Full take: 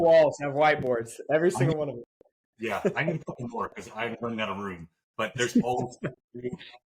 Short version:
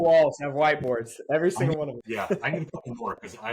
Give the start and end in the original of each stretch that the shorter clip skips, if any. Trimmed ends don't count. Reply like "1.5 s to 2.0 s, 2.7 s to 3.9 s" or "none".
2.5 s to 3.0 s

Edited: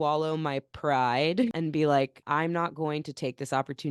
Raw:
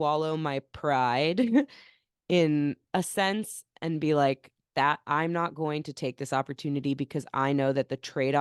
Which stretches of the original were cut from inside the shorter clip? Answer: 1.5 s to 3.8 s, 4.5 s to 5.0 s

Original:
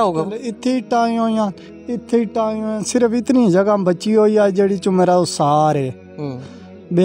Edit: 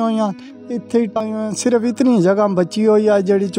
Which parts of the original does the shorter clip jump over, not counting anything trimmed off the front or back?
2.4 s to 2.5 s

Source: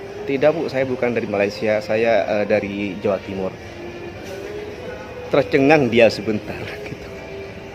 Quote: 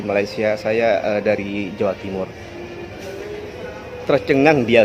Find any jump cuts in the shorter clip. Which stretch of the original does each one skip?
none

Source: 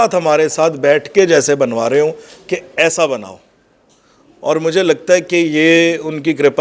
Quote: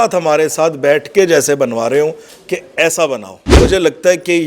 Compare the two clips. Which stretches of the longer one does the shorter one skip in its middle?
3.6 s to 4.6 s

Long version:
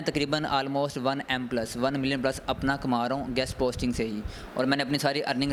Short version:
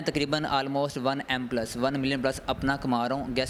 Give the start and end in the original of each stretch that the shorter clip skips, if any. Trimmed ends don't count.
none

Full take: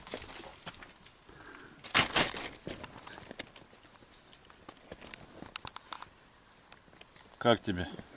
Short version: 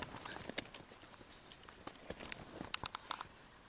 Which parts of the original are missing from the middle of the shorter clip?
none

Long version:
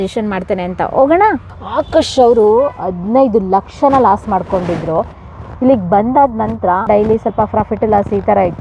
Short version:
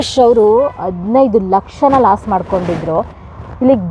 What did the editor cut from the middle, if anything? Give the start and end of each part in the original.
none

